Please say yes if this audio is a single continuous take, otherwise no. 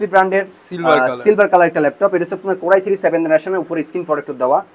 yes